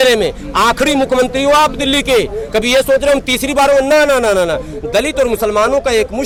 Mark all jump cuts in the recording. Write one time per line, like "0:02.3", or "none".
none